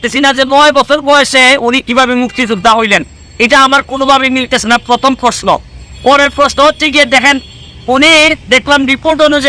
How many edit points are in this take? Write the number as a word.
zero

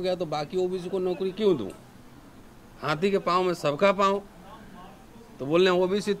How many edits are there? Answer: zero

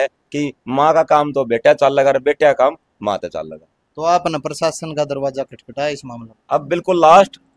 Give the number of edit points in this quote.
zero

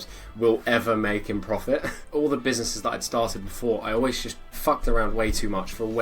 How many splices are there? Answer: one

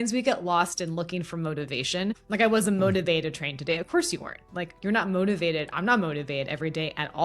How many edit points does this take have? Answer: one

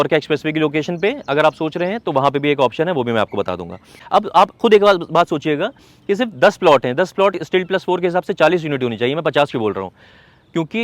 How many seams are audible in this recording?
one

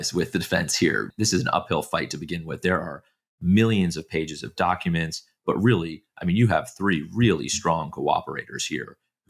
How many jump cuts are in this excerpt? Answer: one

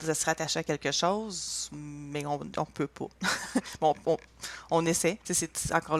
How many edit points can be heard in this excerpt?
zero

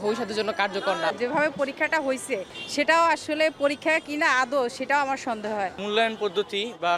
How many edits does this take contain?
three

